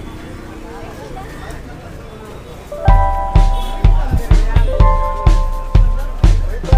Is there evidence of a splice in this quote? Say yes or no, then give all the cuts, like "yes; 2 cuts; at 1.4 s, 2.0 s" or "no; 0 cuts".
no; 0 cuts